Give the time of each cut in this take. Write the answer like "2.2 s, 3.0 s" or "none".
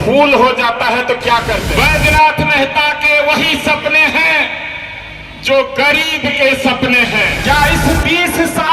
1.7 s, 7.3 s